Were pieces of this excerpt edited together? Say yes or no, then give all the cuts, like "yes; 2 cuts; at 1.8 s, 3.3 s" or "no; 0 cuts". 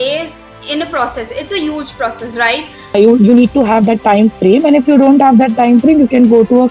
yes; 1 cut; at 3.0 s